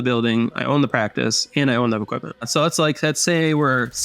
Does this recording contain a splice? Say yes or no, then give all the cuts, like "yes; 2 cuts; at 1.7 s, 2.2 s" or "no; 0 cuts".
yes; 1 cut; at 2.3 s